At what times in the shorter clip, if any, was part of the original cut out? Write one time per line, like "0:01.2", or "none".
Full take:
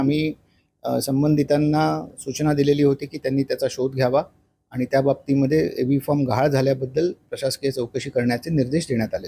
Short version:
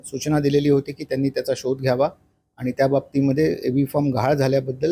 none